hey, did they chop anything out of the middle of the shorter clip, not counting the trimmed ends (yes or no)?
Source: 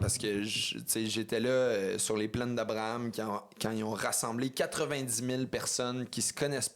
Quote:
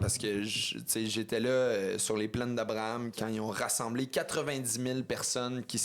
yes